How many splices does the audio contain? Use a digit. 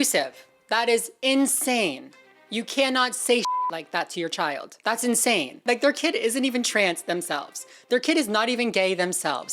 0